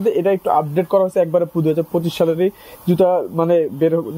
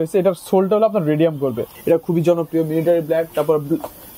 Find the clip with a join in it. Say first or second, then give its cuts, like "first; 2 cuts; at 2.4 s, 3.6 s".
second; 1 cut; at 1.7 s